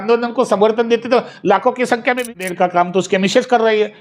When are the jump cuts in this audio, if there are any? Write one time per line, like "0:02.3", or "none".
0:02.3